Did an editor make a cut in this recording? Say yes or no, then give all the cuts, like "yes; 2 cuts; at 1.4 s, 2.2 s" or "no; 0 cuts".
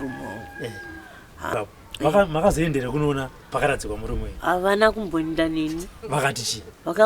yes; 1 cut; at 1.5 s